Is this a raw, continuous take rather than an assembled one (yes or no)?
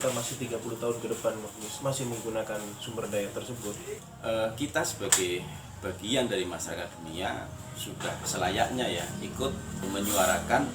no